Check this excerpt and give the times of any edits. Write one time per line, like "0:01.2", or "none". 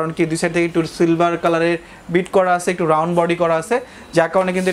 none